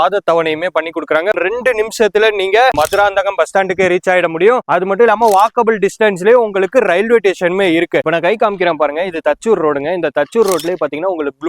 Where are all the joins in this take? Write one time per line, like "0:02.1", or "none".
0:01.4
0:02.7
0:08.1